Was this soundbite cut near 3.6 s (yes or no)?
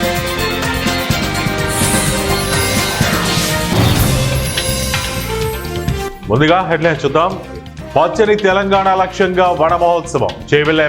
no